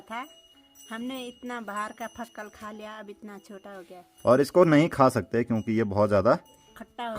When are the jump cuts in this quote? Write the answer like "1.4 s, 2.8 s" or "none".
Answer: 4.0 s